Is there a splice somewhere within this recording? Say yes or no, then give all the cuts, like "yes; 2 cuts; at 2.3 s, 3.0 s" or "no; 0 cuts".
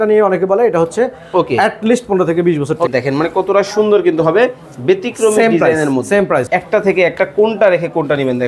yes; 2 cuts; at 2.9 s, 6.5 s